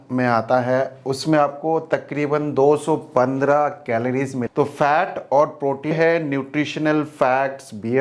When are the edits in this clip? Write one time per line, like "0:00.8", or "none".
0:04.4
0:05.9